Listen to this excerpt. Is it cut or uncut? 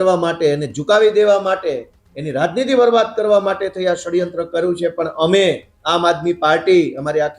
uncut